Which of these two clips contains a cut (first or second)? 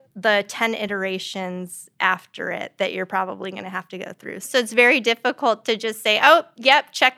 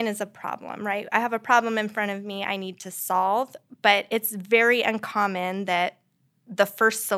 first